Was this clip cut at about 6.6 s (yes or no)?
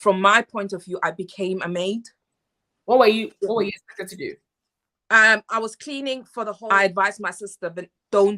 yes